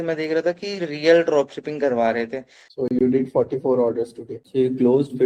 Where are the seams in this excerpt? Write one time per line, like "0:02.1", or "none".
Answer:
0:02.6
0:04.4